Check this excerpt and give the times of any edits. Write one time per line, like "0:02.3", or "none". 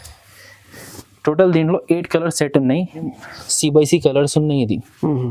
0:03.0